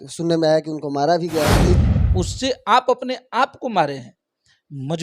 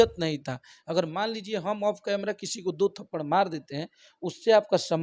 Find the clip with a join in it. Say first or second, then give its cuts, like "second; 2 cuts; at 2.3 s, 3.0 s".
first; 1 cut; at 1.9 s